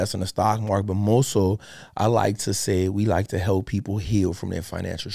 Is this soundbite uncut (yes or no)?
yes